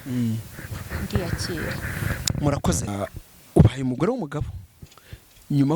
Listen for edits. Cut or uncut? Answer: cut